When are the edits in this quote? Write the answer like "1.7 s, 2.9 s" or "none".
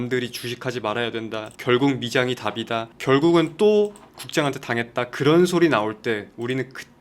1.5 s, 2.9 s